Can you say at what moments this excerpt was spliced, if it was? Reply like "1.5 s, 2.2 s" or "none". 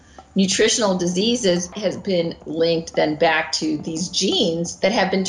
1.7 s